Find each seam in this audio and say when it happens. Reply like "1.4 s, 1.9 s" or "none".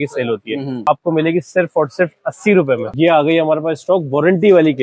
0.9 s, 2.9 s